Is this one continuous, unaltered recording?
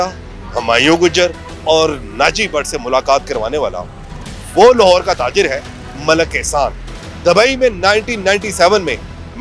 yes; 0 cuts

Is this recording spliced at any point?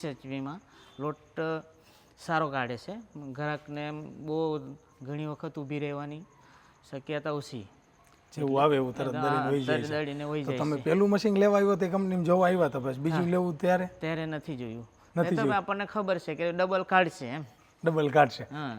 no; 0 cuts

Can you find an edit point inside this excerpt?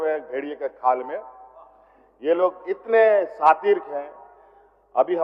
no; 0 cuts

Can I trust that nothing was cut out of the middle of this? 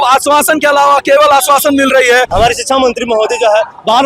no; 1 cut; at 2.3 s

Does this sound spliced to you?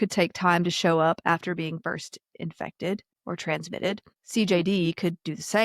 yes; 2 cuts; at 3.1 s, 4.1 s

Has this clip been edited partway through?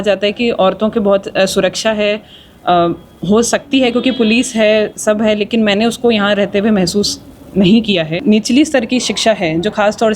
yes; 1 cut; at 8.1 s

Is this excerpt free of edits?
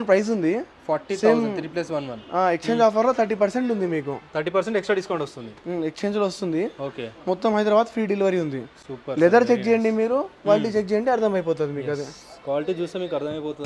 yes; 0 cuts

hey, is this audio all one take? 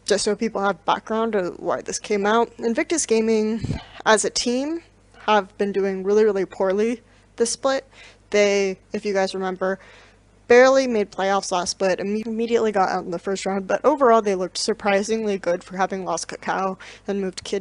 no; 1 cut; at 0.9 s

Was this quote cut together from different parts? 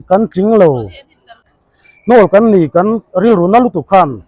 yes; 1 cut; at 1.4 s

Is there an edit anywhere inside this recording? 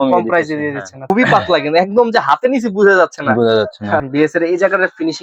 yes; 2 cuts; at 1.0 s, 4.1 s

